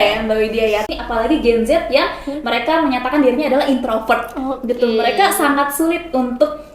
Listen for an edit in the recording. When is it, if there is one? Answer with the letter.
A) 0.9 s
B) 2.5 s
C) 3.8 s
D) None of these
A